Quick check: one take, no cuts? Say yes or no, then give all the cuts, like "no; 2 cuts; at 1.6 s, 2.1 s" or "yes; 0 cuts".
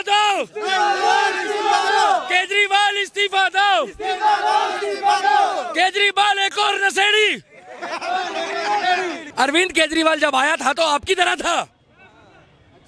no; 1 cut; at 9.2 s